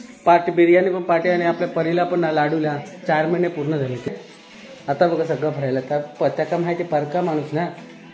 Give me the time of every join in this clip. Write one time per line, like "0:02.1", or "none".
0:04.1